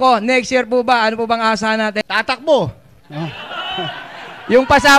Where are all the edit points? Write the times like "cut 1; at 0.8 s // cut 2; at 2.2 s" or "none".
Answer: cut 1; at 2.1 s